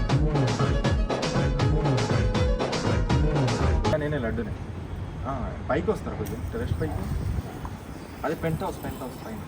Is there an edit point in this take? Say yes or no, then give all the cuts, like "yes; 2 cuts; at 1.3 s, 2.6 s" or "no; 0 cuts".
yes; 1 cut; at 3.9 s